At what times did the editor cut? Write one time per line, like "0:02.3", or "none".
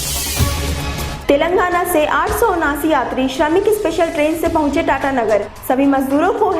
0:01.0